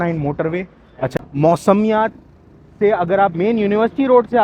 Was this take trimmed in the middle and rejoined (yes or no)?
yes